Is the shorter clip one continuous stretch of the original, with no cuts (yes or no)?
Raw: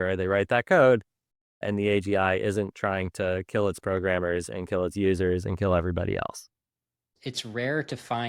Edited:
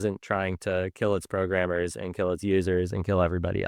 yes